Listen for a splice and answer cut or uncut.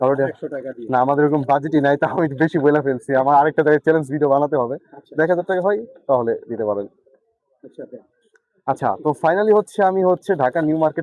uncut